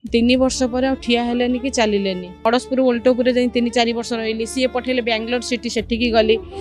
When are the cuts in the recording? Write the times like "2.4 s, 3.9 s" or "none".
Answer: 2.3 s